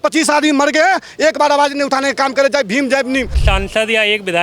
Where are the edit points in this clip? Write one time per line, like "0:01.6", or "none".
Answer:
0:03.4

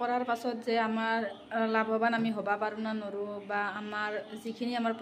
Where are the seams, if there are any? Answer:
none

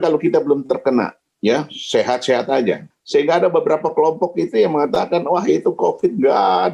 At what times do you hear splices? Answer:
0:01.2
0:02.9

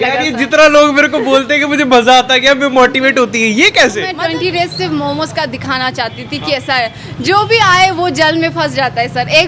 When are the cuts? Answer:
0:04.2

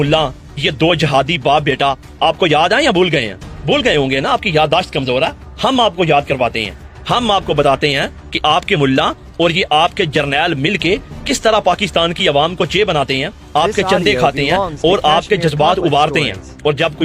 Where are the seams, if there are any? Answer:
none

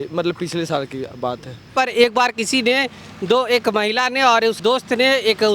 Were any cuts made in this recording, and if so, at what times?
0:01.7
0:04.6

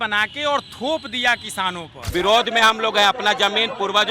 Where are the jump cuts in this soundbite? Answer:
0:01.9

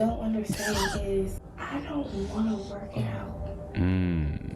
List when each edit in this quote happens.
0:01.5

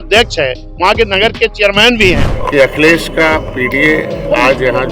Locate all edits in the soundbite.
0:02.3

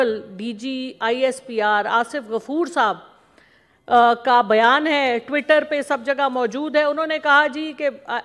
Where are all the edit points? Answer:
none

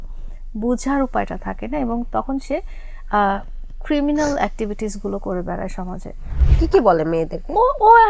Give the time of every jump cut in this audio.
0:06.5

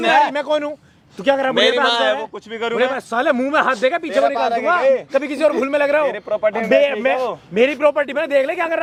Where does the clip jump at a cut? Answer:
none

